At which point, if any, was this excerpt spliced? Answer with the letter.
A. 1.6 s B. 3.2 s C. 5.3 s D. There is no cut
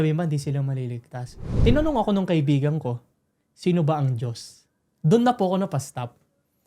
A